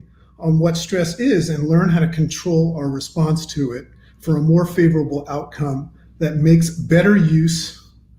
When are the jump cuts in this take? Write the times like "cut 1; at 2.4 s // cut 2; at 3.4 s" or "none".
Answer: none